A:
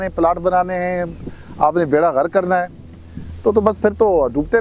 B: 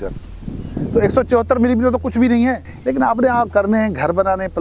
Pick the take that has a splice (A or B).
B